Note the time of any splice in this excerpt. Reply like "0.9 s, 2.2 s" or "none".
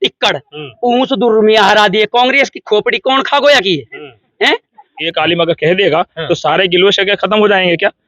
5.0 s